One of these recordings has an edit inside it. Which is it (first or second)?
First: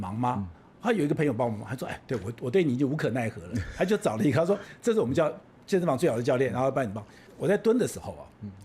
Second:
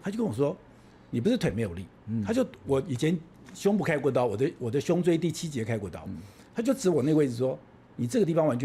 first